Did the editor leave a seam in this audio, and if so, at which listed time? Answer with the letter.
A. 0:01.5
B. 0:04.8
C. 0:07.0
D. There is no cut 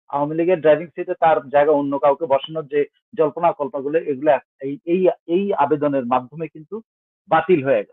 D